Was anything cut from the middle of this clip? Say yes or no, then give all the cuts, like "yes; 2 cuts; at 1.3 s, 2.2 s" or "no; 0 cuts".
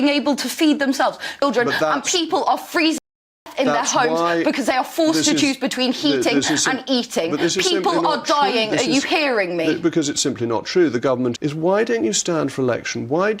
yes; 2 cuts; at 1.4 s, 11.3 s